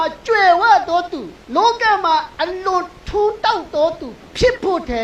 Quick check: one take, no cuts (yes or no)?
no